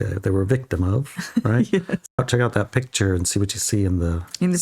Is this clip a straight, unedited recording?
no; 1 cut; at 2.2 s

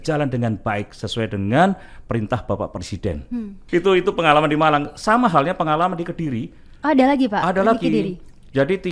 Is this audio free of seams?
yes; 0 cuts

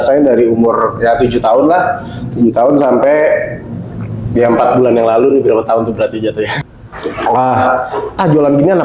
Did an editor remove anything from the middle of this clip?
yes; 1 cut; at 6.5 s

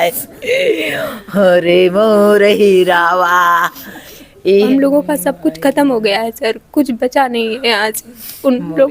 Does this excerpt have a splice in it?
yes; 1 cut; at 4.7 s

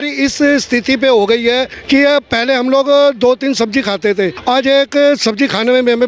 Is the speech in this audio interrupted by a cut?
no; 0 cuts

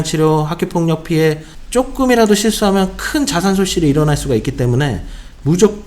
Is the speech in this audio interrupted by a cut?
yes; 1 cut; at 1.5 s

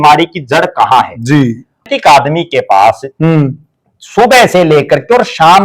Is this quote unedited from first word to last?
no; 1 cut; at 1.8 s

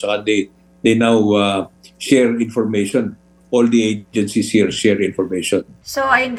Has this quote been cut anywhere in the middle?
no; 0 cuts

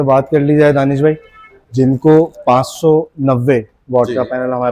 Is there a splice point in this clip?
no; 0 cuts

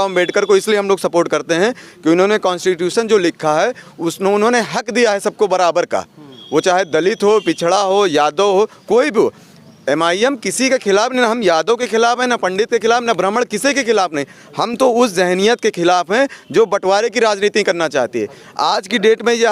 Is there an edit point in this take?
no; 0 cuts

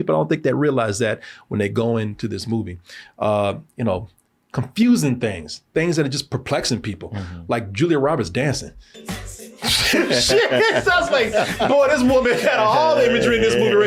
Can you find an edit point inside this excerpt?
no; 0 cuts

